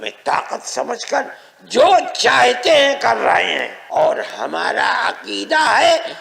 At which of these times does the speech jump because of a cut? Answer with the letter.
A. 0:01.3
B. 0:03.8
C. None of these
B